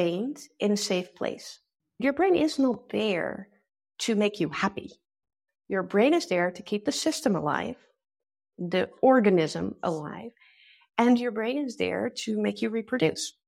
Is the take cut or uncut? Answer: cut